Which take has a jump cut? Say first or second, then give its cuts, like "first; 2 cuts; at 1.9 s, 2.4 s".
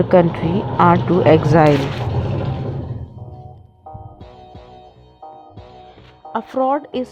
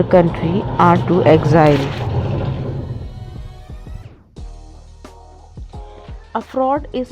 second; 2 cuts; at 3.2 s, 6.3 s